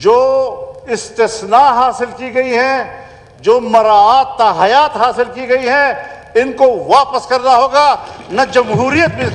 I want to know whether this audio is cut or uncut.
uncut